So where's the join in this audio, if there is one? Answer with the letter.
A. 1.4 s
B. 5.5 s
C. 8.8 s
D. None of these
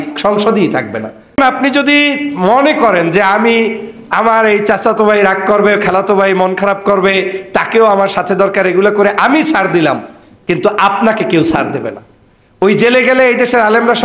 A